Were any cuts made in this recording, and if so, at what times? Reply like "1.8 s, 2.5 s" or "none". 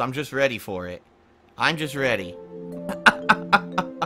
2.0 s